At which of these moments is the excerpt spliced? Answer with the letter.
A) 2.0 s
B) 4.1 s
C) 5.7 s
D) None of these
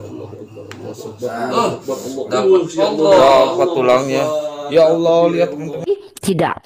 C